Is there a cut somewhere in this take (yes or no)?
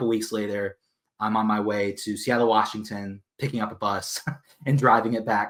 no